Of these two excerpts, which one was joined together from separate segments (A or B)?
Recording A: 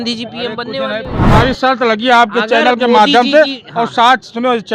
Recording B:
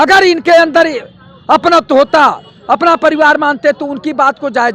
A